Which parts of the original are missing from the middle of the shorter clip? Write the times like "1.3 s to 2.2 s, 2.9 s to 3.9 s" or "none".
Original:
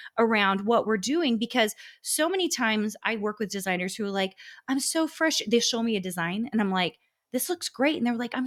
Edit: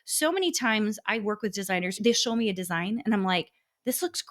3.9 s to 5.4 s